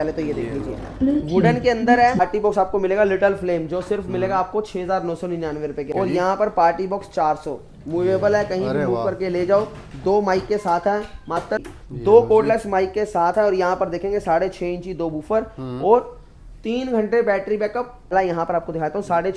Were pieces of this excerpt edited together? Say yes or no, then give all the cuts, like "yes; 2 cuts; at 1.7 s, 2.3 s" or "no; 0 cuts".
yes; 4 cuts; at 2.2 s, 5.9 s, 11.6 s, 18.1 s